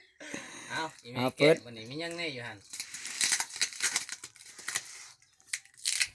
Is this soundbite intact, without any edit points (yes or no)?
yes